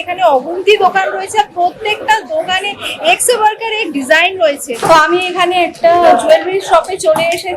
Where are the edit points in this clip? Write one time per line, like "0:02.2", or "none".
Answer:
0:04.7